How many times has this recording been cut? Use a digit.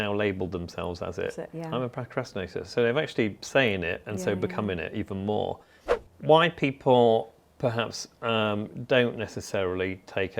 1